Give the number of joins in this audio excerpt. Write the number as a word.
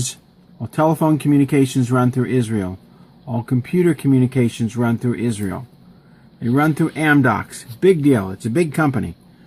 one